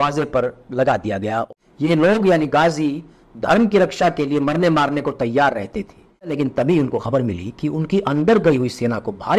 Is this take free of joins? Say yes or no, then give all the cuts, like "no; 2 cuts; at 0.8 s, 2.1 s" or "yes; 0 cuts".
no; 2 cuts; at 1.5 s, 6.3 s